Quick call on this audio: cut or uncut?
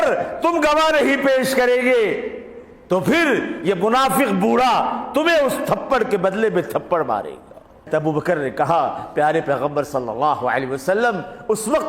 cut